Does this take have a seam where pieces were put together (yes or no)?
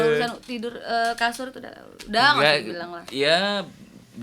no